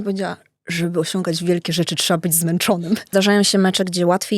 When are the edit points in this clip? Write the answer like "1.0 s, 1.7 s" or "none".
3.1 s